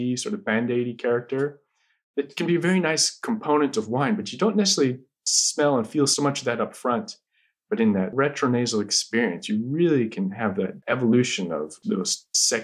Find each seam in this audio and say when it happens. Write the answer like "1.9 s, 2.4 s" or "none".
6.1 s, 10.8 s